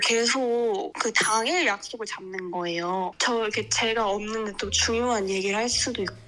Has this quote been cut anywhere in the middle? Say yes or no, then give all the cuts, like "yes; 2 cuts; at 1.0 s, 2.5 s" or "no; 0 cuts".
yes; 2 cuts; at 0.9 s, 3.1 s